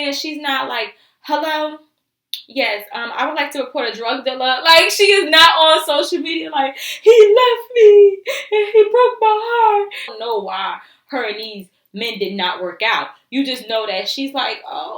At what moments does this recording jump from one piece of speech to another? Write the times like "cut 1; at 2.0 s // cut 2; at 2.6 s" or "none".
cut 1; at 10.1 s

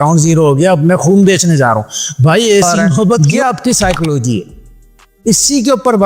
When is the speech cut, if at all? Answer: cut 1; at 3.2 s

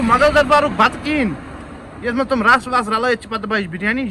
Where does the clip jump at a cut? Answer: none

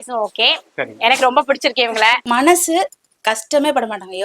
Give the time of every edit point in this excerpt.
cut 1; at 2.2 s

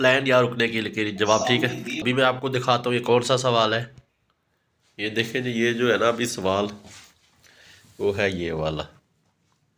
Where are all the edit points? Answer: cut 1; at 2.0 s

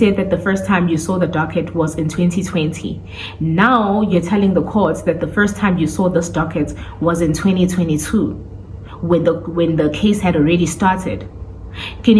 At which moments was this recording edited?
none

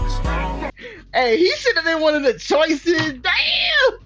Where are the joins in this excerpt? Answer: cut 1; at 0.9 s

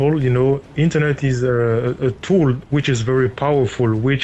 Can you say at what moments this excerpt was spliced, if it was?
none

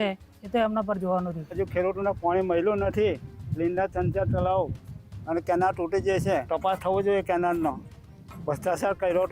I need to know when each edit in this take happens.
cut 1; at 1.6 s // cut 2; at 6.4 s

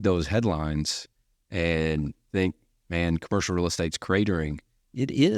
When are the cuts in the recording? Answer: cut 1; at 2.2 s

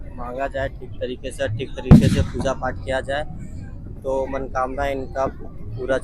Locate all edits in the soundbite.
none

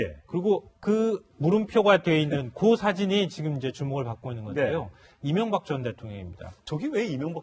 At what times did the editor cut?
cut 1; at 2.7 s

